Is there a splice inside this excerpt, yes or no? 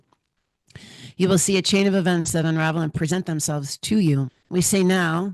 yes